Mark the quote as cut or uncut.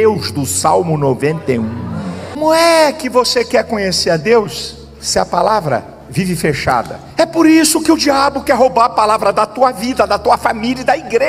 cut